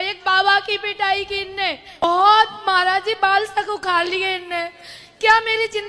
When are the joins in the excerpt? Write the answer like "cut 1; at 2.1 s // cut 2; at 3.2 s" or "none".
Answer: cut 1; at 2.0 s